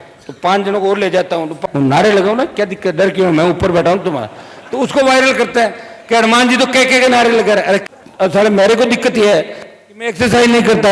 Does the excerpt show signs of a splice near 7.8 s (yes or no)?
yes